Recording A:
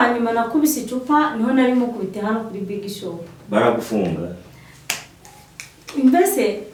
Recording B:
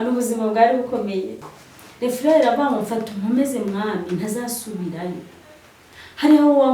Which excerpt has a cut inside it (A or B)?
B